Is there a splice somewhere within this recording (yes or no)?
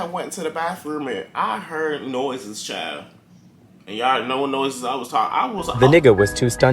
yes